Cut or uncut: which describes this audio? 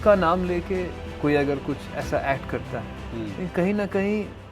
cut